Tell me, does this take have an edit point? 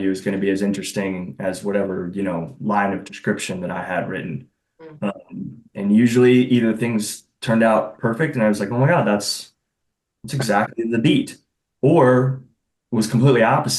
no; 0 cuts

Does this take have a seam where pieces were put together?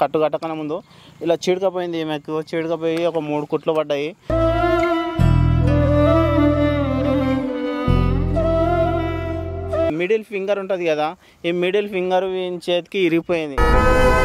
yes; 1 cut; at 9.9 s

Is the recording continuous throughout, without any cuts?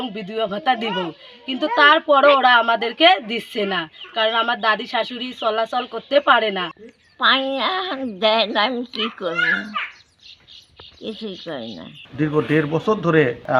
no; 1 cut; at 12.0 s

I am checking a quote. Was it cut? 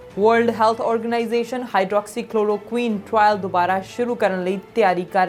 no; 0 cuts

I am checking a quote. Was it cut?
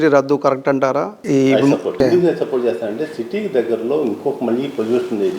yes; 2 cuts; at 1.1 s, 1.9 s

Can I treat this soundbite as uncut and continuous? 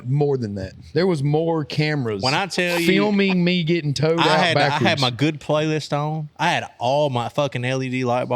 yes; 0 cuts

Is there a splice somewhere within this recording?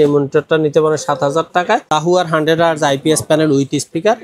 yes; 1 cut; at 1.9 s

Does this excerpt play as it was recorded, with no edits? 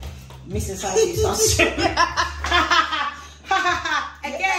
yes; 0 cuts

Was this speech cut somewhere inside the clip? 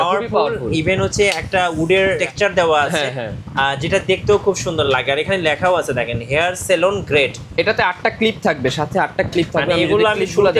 yes; 2 cuts; at 2.2 s, 4.9 s

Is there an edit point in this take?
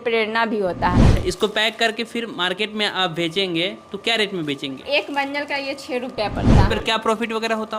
yes; 3 cuts; at 1.1 s, 4.8 s, 6.7 s

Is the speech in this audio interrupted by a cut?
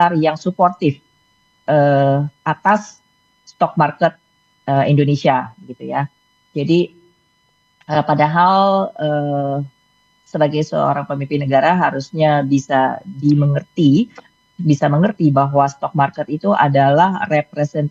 no; 0 cuts

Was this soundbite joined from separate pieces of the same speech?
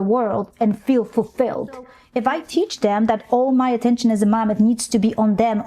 yes; 1 cut; at 2.0 s

